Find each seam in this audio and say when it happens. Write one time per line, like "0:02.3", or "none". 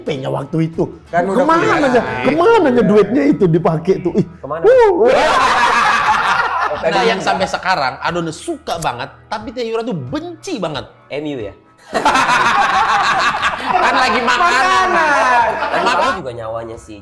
0:06.7
0:16.0